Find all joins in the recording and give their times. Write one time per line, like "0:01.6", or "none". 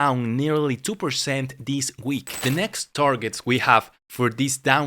0:02.4